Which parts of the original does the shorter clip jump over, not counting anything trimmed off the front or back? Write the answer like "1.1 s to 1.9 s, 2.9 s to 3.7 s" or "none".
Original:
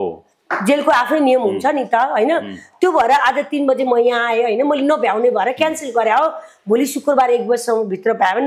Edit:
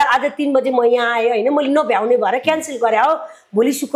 none